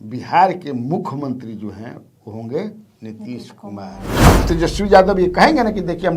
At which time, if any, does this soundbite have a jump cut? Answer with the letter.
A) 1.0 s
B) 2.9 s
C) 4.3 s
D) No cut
C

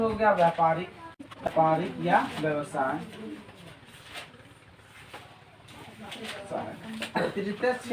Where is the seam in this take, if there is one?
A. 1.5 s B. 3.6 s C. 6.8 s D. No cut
A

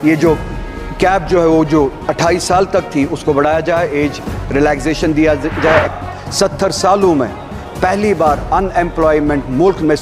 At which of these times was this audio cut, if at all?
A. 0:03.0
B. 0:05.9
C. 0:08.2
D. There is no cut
B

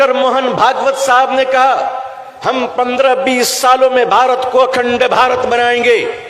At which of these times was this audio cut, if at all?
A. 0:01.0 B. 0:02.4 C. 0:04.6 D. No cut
D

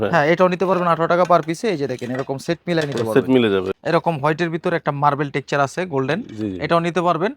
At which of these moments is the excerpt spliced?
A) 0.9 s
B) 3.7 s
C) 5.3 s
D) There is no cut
B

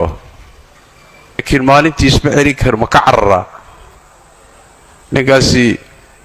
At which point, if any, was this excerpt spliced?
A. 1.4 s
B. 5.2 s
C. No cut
A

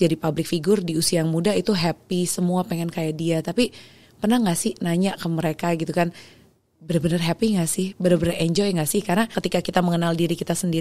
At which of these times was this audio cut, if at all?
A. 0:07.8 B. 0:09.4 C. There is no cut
B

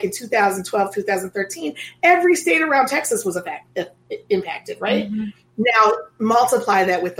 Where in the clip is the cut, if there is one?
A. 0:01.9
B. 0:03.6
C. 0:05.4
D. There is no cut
D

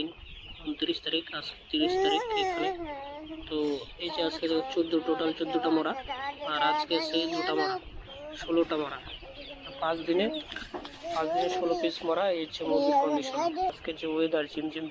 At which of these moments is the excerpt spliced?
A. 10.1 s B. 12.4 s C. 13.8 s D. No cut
C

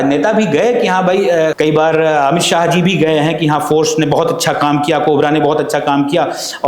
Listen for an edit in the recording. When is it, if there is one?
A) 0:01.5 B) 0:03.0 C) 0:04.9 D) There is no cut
A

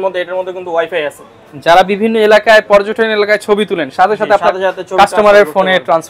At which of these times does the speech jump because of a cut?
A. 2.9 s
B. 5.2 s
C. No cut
C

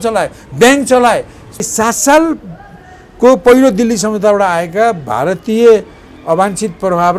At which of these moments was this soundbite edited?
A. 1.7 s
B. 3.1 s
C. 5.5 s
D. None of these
A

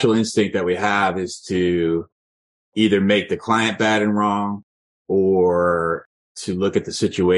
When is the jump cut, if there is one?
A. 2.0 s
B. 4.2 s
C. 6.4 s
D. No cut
D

